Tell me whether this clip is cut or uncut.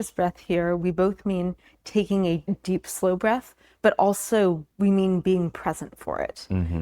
cut